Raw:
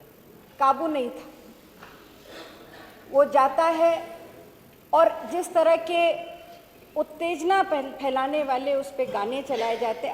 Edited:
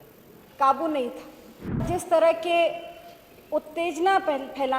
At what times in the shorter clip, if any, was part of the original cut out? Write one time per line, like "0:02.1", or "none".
0:01.8

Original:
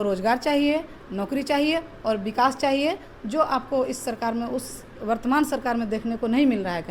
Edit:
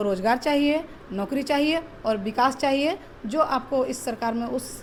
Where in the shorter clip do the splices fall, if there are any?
none

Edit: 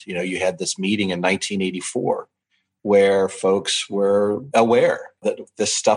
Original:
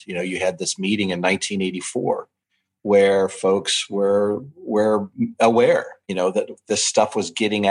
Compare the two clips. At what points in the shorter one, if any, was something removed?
0:04.5
0:05.2

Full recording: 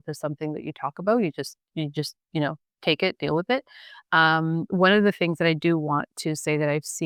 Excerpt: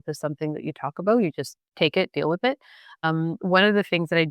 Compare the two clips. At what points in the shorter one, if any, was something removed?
0:01.6
0:03.0

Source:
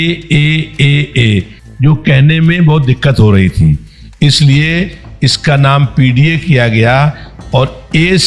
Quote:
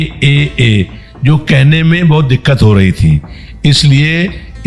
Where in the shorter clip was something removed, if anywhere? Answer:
none

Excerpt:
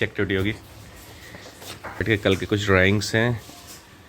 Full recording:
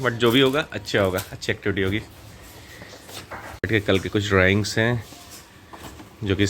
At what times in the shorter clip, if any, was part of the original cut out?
0:01.9

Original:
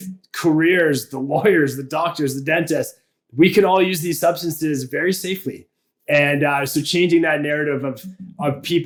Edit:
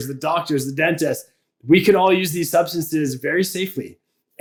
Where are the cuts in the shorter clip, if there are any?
none

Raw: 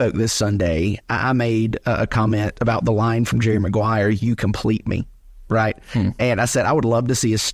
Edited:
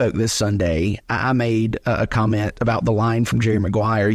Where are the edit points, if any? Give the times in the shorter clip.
none

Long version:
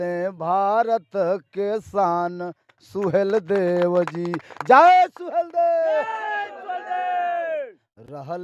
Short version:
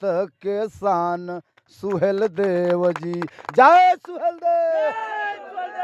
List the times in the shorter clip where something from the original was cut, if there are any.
none

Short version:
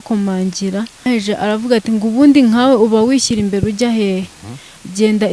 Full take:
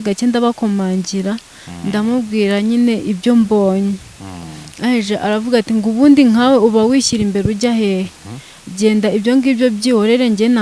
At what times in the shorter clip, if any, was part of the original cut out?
0:01.0

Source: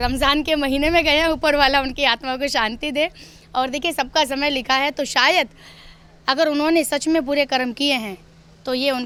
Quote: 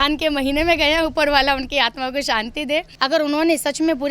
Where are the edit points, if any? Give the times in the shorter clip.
0:02.9

